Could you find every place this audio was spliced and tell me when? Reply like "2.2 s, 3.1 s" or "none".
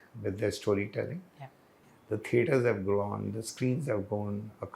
1.7 s